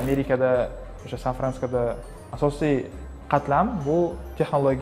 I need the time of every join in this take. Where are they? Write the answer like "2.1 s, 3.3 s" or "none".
2.1 s, 3.0 s